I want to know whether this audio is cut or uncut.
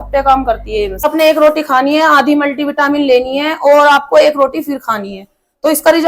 cut